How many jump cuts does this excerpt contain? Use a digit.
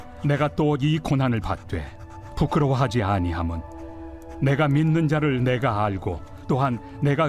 0